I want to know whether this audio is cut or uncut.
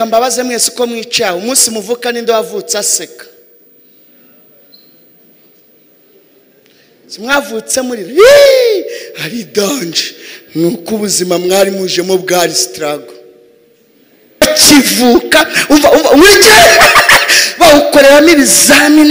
cut